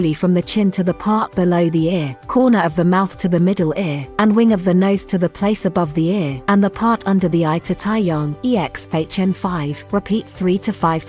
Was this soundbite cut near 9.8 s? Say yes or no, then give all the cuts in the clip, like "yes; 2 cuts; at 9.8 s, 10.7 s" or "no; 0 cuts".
yes; 5 cuts; at 2.2 s, 4.0 s, 6.3 s, 8.3 s, 9.8 s